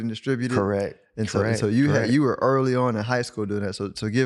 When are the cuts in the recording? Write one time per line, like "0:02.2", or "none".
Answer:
0:01.0